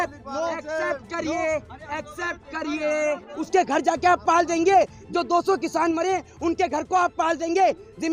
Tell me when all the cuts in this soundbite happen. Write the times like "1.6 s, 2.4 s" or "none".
3.3 s